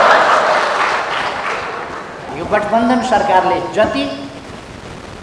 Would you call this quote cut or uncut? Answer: cut